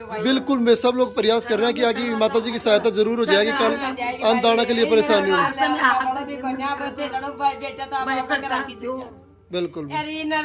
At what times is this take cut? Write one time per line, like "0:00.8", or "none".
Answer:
none